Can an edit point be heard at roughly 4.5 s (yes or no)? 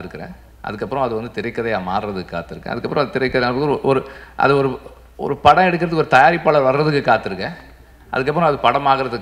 no